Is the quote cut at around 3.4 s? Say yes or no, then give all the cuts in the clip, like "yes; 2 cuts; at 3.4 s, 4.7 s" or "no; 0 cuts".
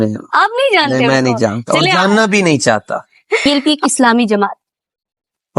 yes; 1 cut; at 3.4 s